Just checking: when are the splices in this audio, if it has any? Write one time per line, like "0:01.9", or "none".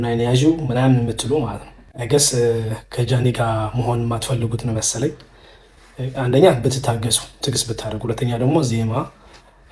none